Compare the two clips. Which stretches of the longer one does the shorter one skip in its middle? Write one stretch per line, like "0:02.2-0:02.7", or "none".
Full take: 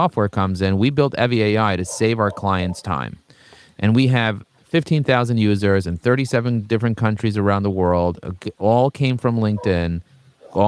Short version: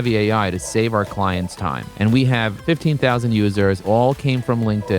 0:03.1-0:03.7
0:04.4-0:04.6
0:05.9-0:08.6